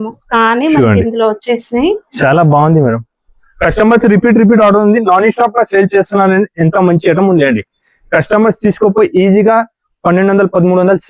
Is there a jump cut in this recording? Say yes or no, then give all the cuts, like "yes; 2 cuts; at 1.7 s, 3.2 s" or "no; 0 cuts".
no; 0 cuts